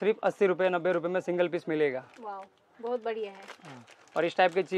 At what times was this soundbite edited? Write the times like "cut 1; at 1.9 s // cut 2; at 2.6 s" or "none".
none